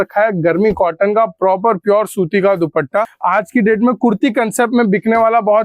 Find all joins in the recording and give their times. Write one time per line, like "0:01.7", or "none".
0:03.1